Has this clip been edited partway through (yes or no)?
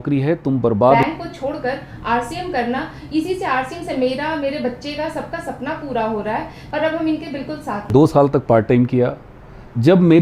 yes